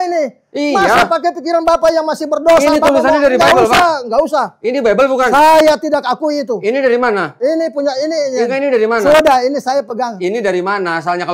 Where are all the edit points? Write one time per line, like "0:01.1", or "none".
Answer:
none

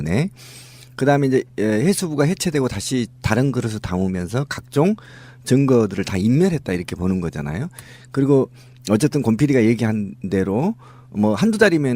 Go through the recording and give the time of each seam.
0:04.7

